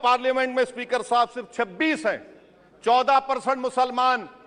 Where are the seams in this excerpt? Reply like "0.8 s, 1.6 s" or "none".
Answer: none